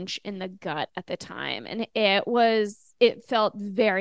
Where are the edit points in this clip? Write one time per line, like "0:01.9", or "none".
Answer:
0:02.8